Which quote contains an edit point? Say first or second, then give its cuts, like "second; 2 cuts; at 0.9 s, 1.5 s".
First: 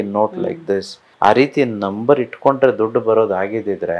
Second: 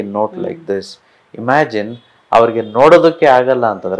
first; 1 cut; at 1.0 s